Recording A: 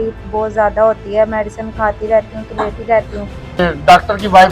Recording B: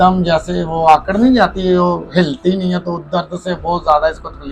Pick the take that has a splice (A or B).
A